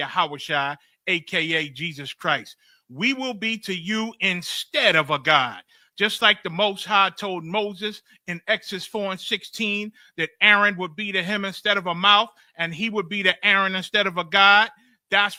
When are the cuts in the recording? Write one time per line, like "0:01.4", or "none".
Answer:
none